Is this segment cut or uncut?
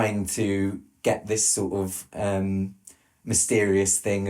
uncut